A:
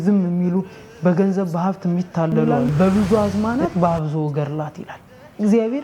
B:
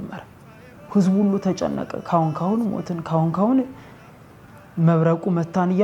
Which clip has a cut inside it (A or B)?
A